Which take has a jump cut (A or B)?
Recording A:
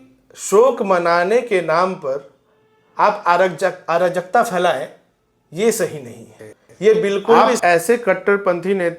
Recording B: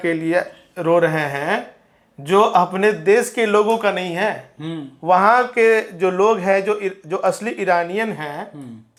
A